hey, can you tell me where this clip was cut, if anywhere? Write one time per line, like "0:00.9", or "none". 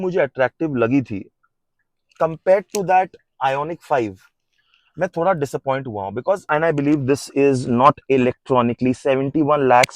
0:06.4